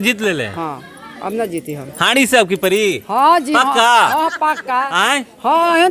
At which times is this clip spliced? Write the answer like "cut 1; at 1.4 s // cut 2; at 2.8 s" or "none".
none